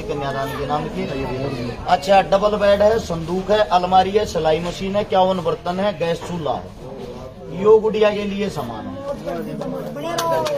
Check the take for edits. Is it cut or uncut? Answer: uncut